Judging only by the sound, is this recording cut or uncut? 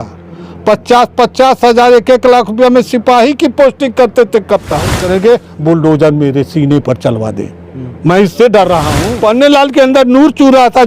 cut